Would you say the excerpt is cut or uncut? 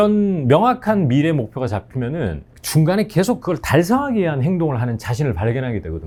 uncut